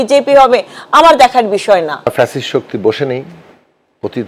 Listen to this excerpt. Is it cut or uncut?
cut